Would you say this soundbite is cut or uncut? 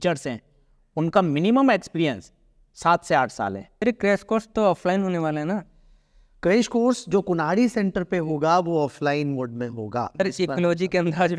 cut